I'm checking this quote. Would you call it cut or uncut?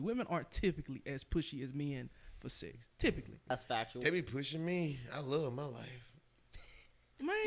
cut